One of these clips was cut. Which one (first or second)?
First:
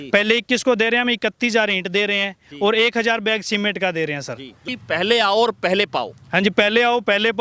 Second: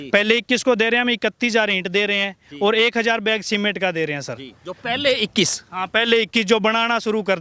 first